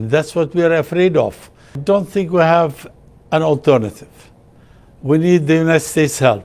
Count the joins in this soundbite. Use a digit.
1